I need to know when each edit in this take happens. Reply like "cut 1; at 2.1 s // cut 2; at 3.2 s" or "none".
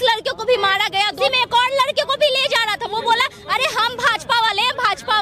cut 1; at 1.2 s